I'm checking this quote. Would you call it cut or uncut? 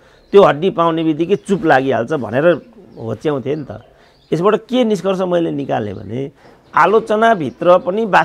uncut